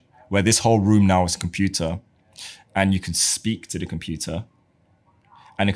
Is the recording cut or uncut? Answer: uncut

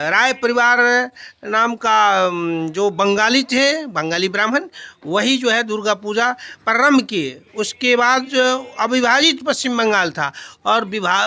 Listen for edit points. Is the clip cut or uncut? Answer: uncut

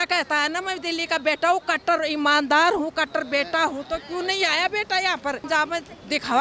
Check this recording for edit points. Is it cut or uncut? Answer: cut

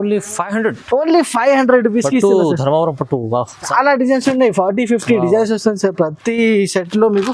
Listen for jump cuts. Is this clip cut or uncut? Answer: cut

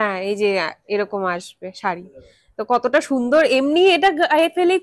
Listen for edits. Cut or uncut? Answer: uncut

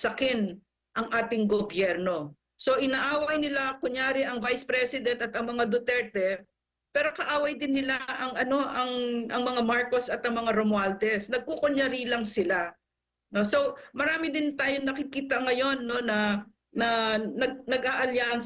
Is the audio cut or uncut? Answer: uncut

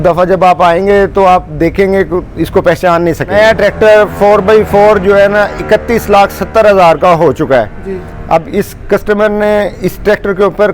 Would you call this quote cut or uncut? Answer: cut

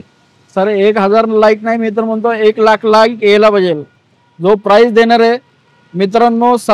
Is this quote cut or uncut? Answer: uncut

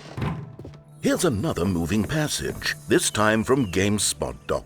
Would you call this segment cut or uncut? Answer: cut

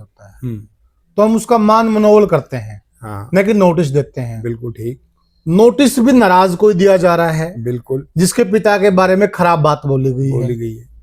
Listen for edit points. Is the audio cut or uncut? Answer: uncut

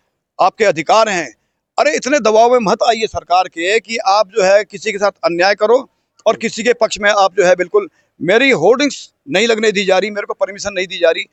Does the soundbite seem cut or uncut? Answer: uncut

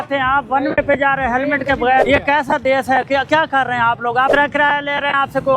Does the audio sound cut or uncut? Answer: cut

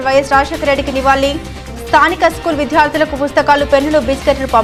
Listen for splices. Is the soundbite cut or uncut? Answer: uncut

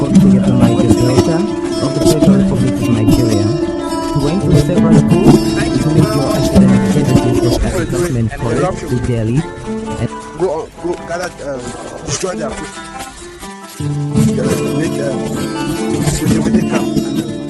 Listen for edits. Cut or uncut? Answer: uncut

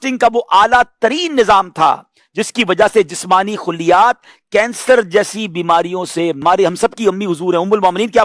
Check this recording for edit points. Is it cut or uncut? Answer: cut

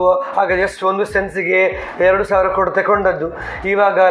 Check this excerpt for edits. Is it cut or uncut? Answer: uncut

